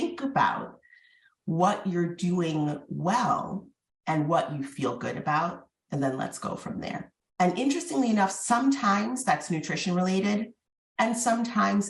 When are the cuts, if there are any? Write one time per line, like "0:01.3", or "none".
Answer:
0:07.2